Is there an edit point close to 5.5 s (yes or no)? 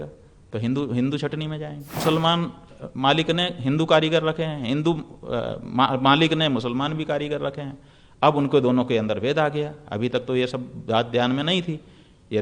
no